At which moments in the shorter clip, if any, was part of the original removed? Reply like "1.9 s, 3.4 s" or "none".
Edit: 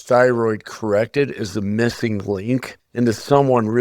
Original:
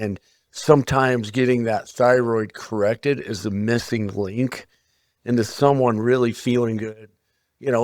2.8 s